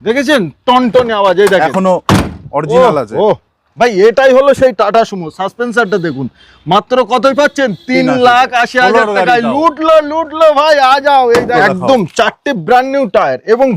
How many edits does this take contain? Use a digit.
1